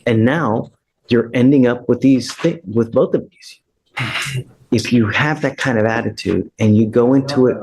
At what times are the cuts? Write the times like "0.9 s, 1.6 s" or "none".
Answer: 4.2 s

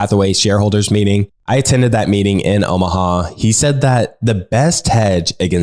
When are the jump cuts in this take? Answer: 1.3 s

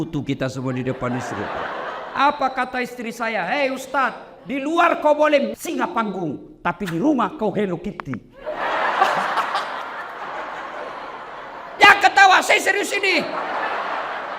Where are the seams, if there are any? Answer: 10.2 s

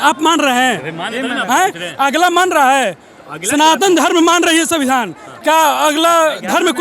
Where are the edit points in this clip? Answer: none

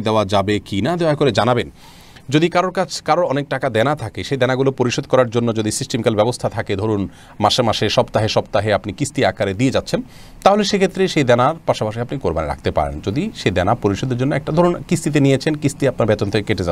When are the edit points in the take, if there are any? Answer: none

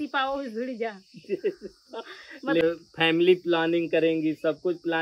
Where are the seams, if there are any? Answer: 2.6 s

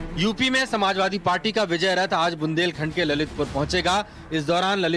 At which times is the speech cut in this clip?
3.3 s

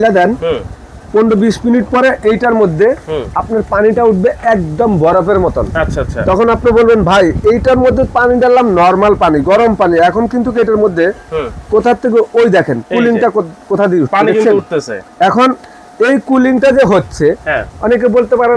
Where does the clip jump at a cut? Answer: none

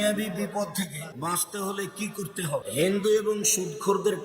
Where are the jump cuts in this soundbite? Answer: 1.0 s, 2.7 s

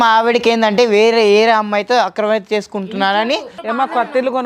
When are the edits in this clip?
3.5 s

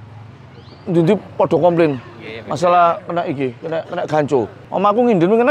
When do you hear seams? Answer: 4.6 s

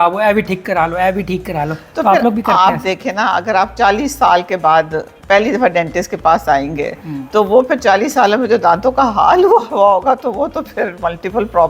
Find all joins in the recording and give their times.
none

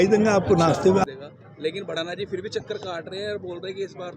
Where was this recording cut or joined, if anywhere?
1.1 s

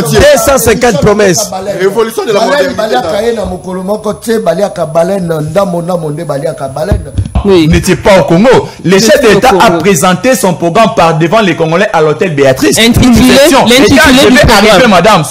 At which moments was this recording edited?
7.4 s

